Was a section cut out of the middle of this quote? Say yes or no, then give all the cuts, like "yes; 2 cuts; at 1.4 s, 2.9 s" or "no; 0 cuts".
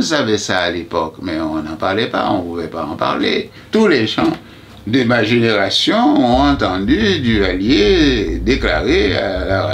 yes; 1 cut; at 3.6 s